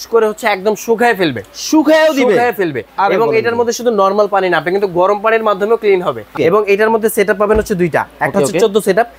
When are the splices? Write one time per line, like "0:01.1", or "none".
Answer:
0:06.3